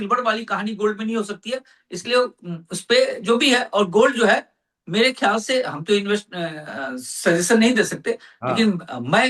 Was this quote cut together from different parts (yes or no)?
no